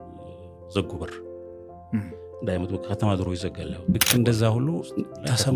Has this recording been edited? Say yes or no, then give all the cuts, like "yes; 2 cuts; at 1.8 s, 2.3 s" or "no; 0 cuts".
yes; 1 cut; at 4.0 s